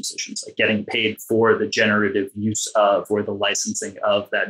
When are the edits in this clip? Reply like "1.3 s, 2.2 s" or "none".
none